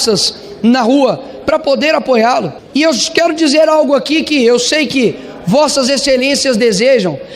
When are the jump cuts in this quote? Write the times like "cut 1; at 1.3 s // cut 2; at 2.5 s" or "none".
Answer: cut 1; at 2.6 s